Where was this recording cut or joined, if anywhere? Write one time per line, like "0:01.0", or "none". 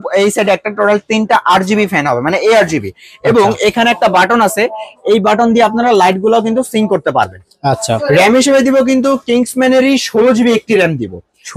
0:07.9